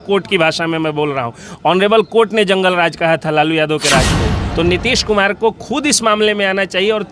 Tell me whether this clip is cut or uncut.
cut